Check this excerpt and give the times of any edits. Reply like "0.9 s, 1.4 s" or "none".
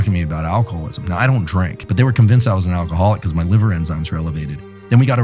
1.8 s